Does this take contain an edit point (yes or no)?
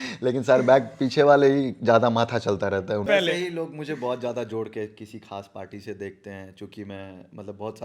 yes